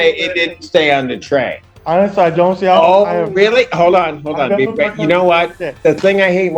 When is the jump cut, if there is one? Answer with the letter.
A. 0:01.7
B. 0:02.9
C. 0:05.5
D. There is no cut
A